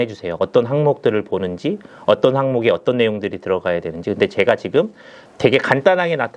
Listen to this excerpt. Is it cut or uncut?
uncut